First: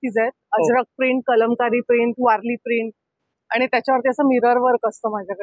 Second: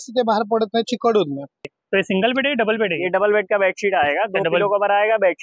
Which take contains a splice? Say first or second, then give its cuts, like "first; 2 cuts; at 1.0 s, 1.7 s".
second; 1 cut; at 1.7 s